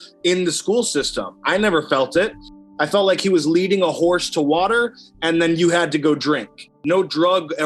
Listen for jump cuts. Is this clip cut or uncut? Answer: cut